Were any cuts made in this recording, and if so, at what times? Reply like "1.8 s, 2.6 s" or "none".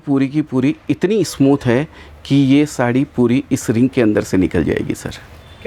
none